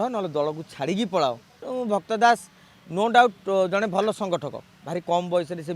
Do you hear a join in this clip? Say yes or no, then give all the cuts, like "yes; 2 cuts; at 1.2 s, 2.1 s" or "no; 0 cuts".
yes; 1 cut; at 1.5 s